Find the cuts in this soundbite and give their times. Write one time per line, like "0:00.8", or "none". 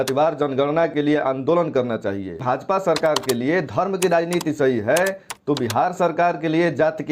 0:02.4